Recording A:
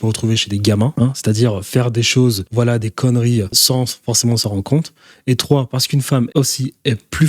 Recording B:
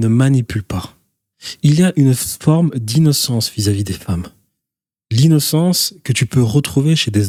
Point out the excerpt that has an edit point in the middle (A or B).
A